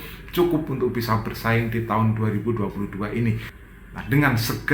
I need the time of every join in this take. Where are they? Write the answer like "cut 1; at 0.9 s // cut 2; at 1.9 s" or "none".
cut 1; at 3.5 s